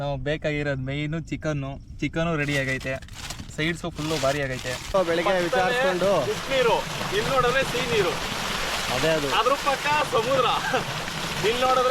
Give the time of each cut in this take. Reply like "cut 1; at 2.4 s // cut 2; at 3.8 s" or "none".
cut 1; at 4.9 s